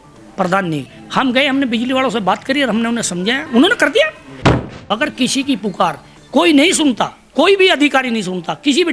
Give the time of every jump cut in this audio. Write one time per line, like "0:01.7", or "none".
0:01.0
0:03.4
0:04.7